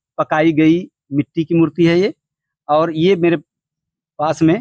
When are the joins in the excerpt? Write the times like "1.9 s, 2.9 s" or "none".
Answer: none